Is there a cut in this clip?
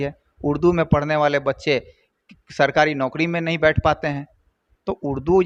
no; 0 cuts

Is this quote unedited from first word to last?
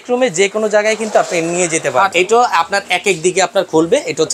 no; 1 cut; at 2.1 s

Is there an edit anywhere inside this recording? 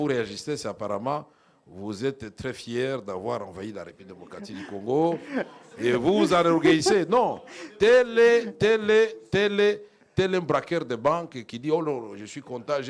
no; 0 cuts

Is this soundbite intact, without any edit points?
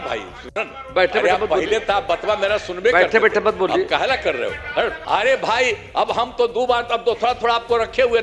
no; 1 cut; at 5.0 s

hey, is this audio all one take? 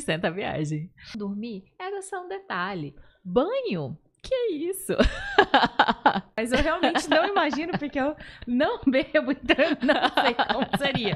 no; 2 cuts; at 1.1 s, 6.3 s

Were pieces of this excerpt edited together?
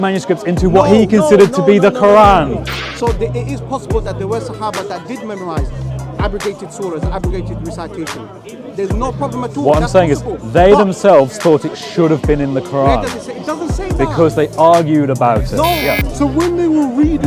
yes; 2 cuts; at 2.8 s, 15.8 s

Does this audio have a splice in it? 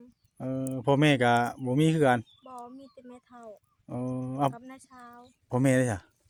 no; 0 cuts

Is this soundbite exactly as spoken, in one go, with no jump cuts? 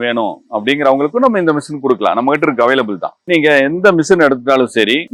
yes; 0 cuts

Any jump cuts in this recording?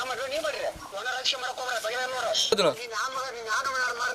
yes; 1 cut; at 2.4 s

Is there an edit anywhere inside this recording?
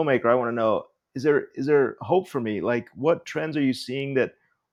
no; 0 cuts

